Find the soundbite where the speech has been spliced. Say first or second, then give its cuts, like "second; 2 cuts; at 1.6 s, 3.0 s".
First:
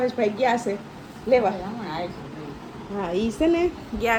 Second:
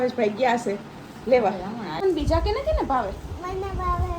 second; 1 cut; at 2.0 s